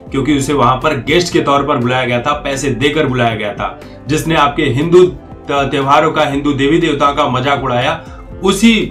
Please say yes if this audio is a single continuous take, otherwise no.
yes